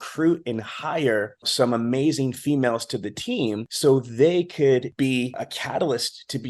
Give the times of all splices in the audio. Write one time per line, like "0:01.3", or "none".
0:01.5
0:03.7
0:05.0